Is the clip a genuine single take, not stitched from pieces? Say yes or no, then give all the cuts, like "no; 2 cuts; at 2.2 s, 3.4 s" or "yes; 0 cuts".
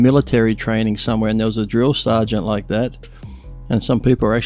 yes; 0 cuts